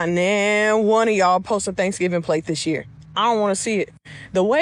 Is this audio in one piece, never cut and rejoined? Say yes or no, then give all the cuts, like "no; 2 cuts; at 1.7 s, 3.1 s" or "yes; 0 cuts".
yes; 0 cuts